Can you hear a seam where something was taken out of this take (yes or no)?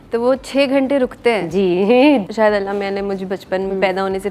yes